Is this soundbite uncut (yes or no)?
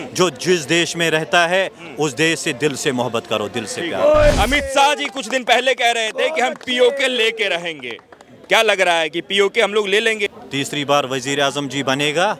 no